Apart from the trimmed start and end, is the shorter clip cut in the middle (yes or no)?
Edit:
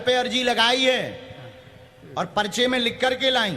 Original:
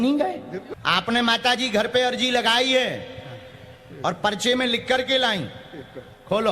no